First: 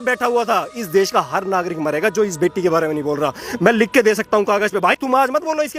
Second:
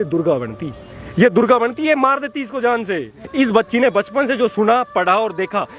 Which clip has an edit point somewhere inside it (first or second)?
second